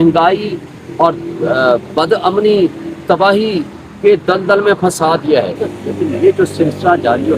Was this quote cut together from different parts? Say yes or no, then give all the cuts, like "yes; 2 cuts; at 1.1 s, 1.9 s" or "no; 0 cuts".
yes; 1 cut; at 5.6 s